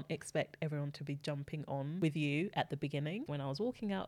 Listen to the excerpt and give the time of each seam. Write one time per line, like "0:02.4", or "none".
0:02.0
0:03.2

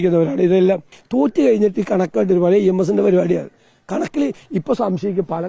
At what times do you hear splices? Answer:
0:01.0

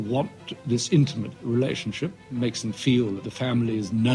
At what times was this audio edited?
0:01.3
0:03.3

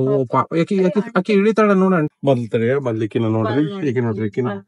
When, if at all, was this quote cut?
0:02.1

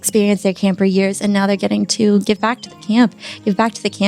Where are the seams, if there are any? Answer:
0:02.2

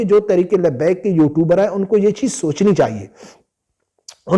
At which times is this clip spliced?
none

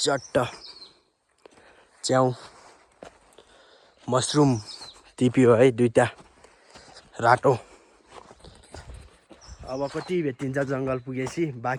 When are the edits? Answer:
none

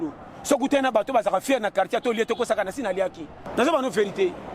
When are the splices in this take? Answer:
0:03.4

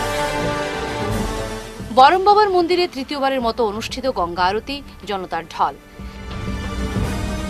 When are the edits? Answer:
0:01.0

